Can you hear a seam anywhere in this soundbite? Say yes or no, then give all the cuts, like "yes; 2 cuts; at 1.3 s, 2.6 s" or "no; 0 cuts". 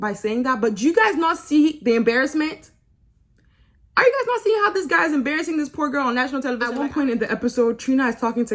yes; 1 cut; at 6.6 s